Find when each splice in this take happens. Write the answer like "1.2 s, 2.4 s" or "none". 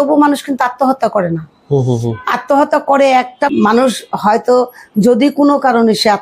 3.5 s